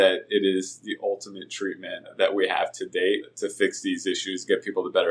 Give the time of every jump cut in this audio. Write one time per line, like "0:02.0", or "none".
0:02.1
0:03.4